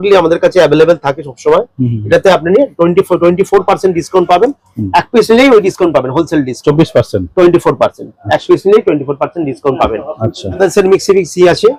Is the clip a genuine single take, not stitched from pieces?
yes; 0 cuts

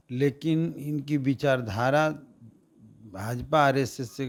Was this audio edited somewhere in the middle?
no; 0 cuts

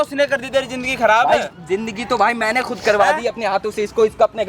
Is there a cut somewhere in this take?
no; 0 cuts

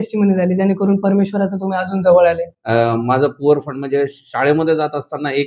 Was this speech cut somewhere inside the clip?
yes; 1 cut; at 2.5 s

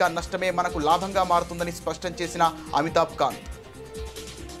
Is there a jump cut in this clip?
no; 0 cuts

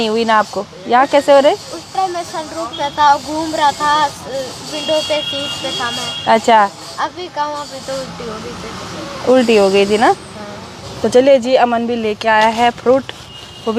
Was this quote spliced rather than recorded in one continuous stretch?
no; 0 cuts

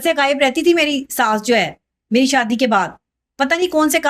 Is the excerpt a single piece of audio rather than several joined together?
yes; 0 cuts

